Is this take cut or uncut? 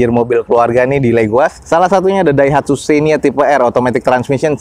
uncut